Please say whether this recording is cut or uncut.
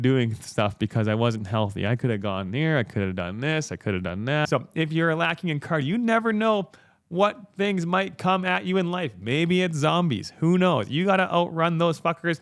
cut